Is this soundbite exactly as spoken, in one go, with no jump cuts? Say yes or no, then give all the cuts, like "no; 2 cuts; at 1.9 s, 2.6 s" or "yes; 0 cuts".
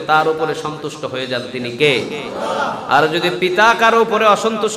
yes; 0 cuts